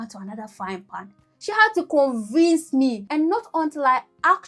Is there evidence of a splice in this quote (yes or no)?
no